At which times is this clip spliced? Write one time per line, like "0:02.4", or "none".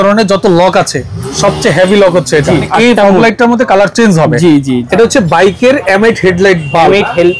0:02.7
0:04.8